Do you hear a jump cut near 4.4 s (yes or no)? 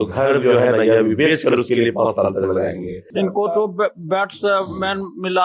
no